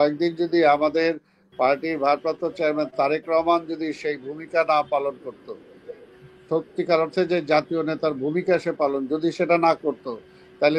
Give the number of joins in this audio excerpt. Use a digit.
0